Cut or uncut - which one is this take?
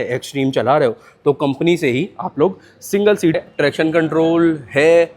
cut